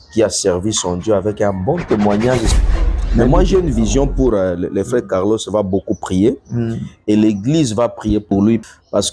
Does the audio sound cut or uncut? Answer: cut